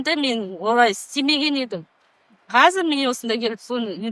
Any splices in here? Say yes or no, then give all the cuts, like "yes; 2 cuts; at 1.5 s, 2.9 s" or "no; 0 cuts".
no; 0 cuts